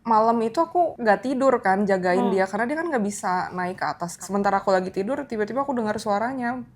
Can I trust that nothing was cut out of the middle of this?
no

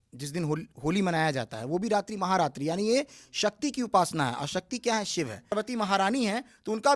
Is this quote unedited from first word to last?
no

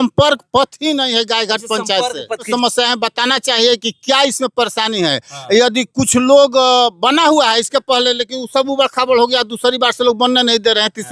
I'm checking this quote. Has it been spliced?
yes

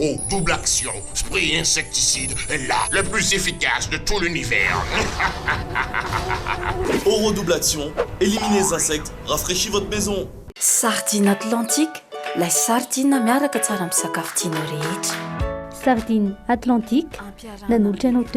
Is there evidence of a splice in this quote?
no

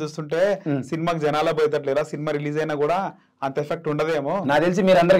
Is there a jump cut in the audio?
no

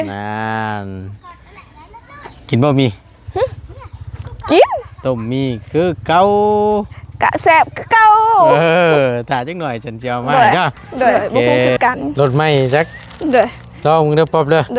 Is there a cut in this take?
yes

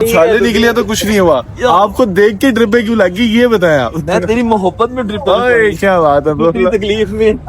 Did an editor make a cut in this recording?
no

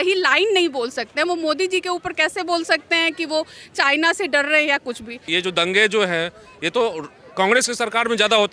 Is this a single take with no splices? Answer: no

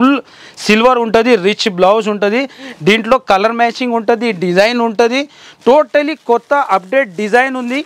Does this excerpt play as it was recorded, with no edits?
yes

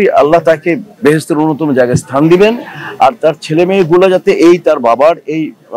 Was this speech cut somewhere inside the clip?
no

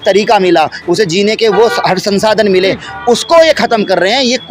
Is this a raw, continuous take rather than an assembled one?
yes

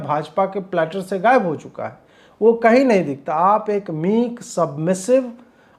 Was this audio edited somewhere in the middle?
no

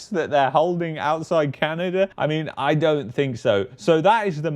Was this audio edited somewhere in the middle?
no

